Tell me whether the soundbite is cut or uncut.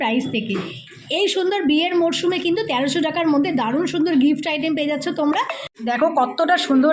cut